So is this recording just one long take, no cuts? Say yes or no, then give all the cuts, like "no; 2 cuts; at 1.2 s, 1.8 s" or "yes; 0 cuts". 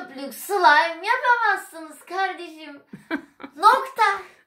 yes; 0 cuts